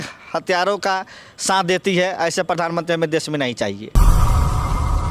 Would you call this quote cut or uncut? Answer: uncut